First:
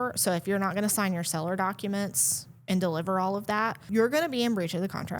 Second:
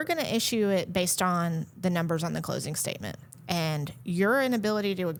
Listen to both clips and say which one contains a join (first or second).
first